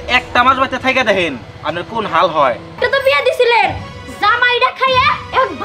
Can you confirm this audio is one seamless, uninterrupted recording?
no; 1 cut; at 2.8 s

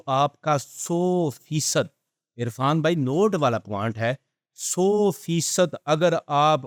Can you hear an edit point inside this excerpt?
no; 0 cuts

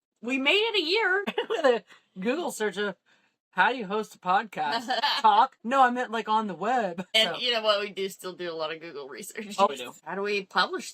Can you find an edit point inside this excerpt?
yes; 5 cuts; at 1.3 s, 5.0 s, 5.6 s, 7.0 s, 9.7 s

